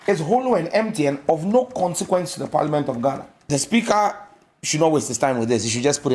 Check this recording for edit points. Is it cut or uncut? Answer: cut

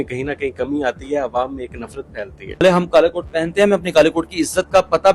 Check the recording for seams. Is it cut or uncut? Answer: cut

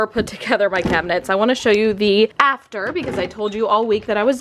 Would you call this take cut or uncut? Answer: uncut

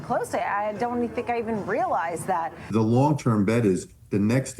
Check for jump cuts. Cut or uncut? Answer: cut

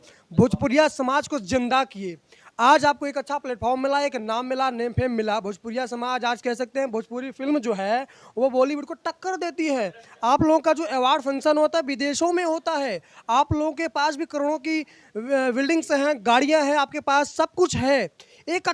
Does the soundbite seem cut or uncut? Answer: uncut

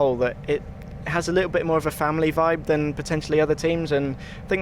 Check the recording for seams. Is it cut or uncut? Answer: uncut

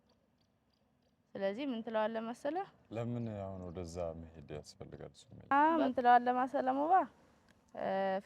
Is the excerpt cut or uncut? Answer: cut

